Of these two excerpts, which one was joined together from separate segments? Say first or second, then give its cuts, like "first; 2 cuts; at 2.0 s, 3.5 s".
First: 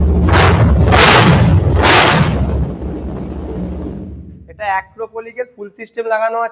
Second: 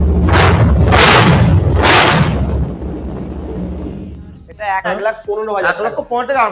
second; 1 cut; at 4.8 s